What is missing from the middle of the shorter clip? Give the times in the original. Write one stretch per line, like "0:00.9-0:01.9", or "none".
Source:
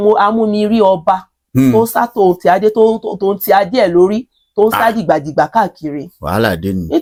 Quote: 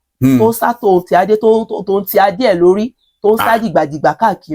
none